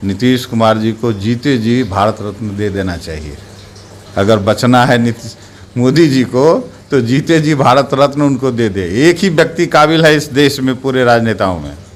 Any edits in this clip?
no; 0 cuts

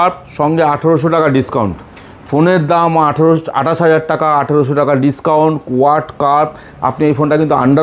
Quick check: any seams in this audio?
no; 0 cuts

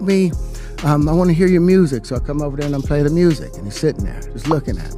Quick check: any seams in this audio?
no; 0 cuts

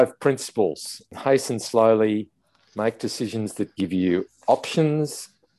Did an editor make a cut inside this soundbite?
no; 0 cuts

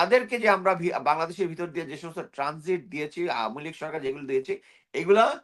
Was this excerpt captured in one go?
yes; 0 cuts

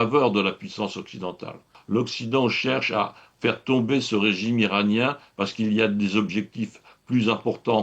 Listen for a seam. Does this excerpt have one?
yes; 1 cut; at 1.8 s

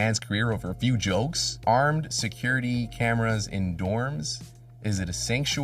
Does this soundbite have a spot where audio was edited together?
yes; 1 cut; at 1.5 s

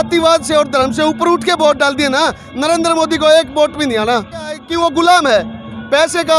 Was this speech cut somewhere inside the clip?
yes; 1 cut; at 4.6 s

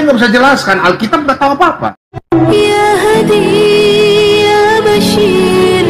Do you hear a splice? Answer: yes; 1 cut; at 2.1 s

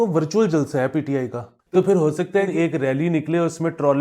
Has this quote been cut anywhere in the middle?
yes; 2 cuts; at 1.5 s, 2.5 s

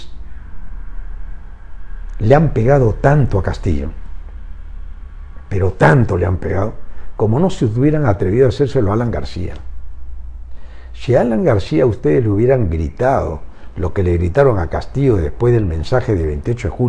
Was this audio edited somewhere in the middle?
no; 0 cuts

